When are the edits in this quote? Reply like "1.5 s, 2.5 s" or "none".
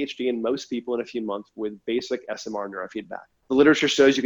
3.3 s